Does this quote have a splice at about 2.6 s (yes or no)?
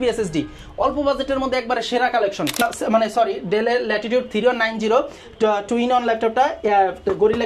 yes